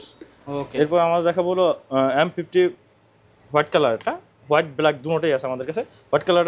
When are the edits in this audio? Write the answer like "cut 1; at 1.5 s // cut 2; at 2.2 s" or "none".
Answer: none